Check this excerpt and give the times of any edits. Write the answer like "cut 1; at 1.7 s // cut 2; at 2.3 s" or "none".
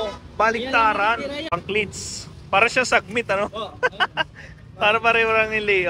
cut 1; at 1.5 s